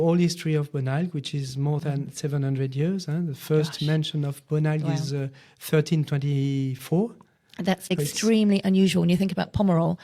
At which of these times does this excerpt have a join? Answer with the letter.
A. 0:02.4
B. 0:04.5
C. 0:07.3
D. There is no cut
D